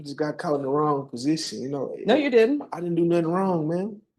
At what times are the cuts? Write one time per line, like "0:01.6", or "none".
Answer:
none